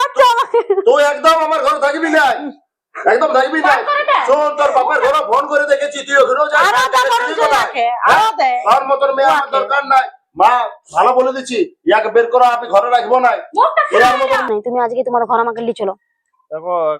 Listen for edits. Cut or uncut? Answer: cut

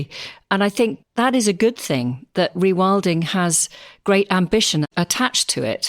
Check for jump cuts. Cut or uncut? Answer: cut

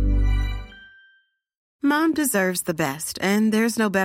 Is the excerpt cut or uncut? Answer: cut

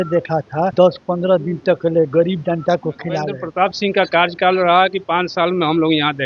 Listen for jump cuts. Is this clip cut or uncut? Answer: cut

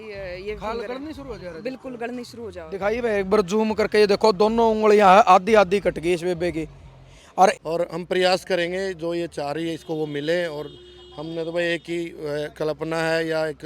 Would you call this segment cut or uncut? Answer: cut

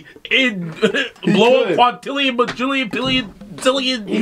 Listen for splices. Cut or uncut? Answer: uncut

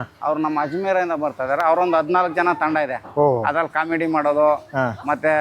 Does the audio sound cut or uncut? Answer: uncut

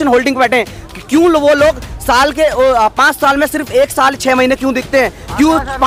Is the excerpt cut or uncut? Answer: uncut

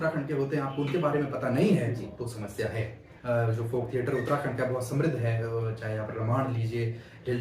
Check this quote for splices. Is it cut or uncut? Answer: cut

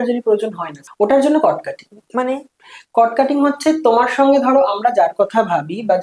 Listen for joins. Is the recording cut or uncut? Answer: uncut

